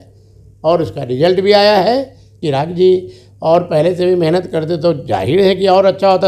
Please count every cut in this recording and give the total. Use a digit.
1